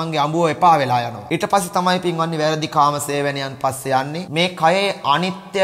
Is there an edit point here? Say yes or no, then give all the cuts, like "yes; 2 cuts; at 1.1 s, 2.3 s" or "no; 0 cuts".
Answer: yes; 2 cuts; at 1.2 s, 4.2 s